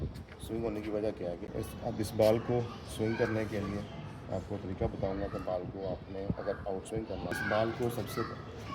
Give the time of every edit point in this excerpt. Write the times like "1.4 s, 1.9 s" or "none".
1.4 s, 7.3 s

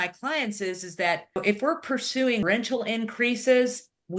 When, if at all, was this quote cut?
1.4 s, 2.4 s

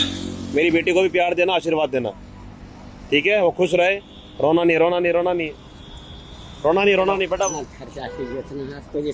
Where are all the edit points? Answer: none

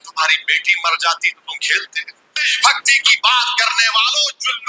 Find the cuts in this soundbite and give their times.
2.3 s

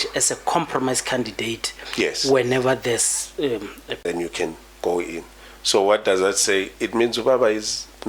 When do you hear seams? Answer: 4.0 s

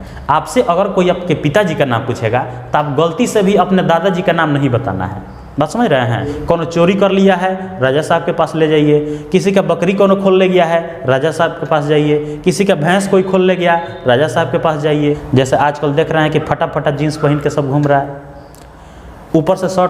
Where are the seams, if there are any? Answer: 6.3 s, 15.2 s

